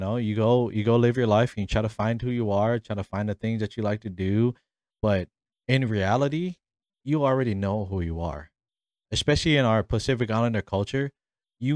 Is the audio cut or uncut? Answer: uncut